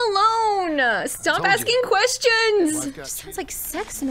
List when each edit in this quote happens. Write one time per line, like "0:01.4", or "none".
0:03.1